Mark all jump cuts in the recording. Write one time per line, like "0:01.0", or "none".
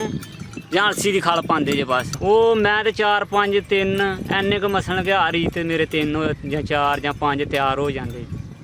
0:02.2